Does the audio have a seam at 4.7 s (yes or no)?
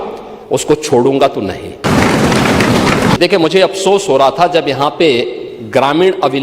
no